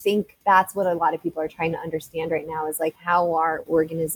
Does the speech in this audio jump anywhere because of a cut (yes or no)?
no